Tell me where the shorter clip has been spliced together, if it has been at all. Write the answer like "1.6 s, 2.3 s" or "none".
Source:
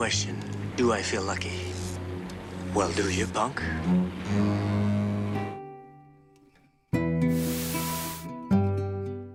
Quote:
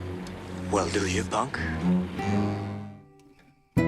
2.7 s